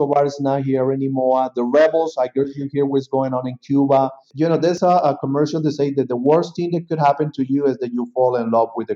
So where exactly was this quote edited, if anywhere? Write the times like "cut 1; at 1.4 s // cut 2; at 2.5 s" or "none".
cut 1; at 4.7 s

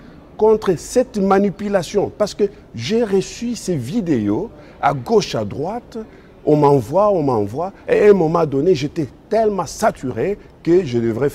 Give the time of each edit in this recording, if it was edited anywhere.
none

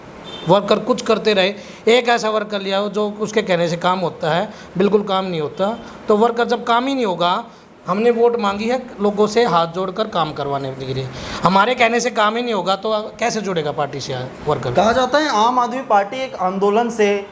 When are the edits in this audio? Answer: none

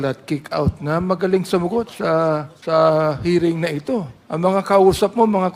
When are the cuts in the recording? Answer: cut 1; at 2.5 s // cut 2; at 4.2 s

